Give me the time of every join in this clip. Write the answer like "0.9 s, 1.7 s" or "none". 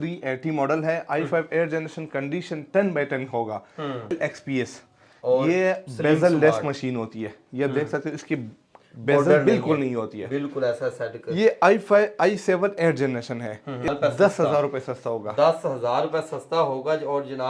4.1 s, 13.9 s